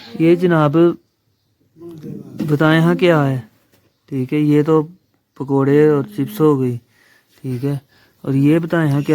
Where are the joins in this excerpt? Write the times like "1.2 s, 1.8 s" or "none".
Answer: none